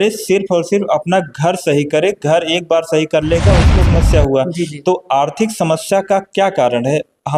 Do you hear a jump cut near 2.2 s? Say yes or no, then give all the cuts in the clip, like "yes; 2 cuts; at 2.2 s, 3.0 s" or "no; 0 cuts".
no; 1 cut; at 3.8 s